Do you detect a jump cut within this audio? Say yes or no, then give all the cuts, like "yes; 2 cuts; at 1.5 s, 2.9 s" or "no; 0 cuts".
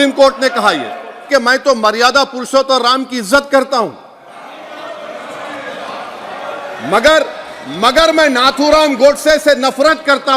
yes; 1 cut; at 1.3 s